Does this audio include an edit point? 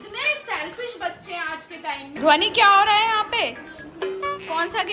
yes; 1 cut; at 2.1 s

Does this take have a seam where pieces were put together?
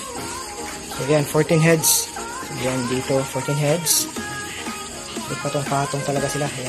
no; 0 cuts

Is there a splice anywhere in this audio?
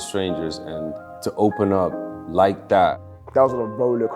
yes; 2 cuts; at 1.1 s, 3.1 s

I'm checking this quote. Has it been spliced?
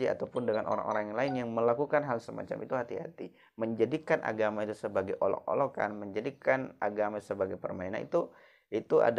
no; 0 cuts

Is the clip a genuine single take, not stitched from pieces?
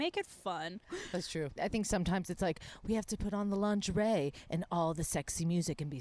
yes; 0 cuts

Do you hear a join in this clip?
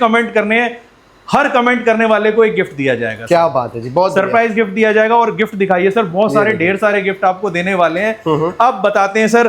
no; 0 cuts

